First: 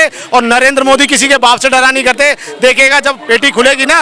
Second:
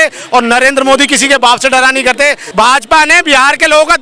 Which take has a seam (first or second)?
second